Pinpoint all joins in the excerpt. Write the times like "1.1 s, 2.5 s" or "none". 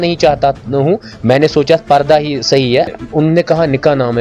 2.9 s